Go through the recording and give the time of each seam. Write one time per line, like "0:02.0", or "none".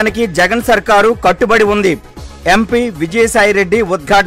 none